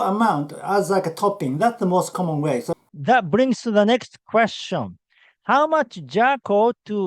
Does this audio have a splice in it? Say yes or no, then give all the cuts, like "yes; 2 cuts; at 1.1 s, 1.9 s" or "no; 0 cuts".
yes; 1 cut; at 2.8 s